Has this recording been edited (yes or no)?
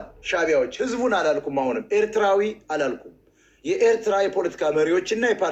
no